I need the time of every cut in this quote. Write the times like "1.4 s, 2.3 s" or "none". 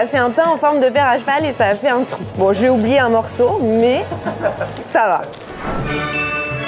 2.2 s, 5.4 s